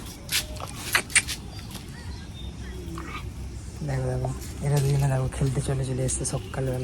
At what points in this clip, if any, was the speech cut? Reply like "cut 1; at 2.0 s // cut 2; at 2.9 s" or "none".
none